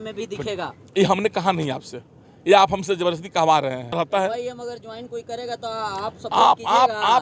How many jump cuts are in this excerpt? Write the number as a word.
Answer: one